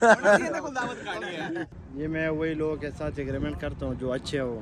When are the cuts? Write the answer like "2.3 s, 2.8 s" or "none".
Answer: 1.6 s